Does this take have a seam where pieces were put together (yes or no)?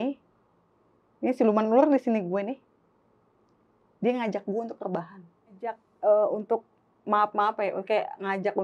yes